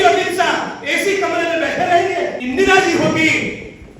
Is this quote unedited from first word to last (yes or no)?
no